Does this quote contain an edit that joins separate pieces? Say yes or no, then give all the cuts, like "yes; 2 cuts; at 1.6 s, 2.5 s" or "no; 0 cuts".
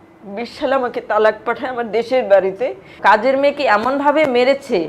yes; 1 cut; at 2.9 s